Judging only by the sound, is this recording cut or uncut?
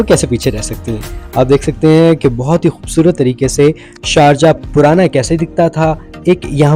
uncut